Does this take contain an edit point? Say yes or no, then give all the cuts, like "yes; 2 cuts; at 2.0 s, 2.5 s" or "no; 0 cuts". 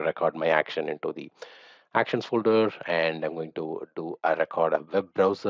no; 0 cuts